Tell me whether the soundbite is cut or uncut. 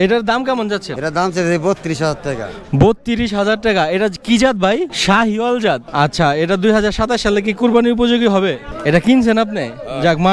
cut